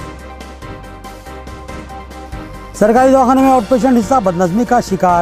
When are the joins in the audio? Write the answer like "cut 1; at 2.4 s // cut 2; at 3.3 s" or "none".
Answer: cut 1; at 2.0 s